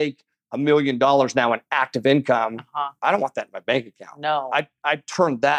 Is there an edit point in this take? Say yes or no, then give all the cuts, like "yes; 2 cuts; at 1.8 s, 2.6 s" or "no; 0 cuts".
no; 0 cuts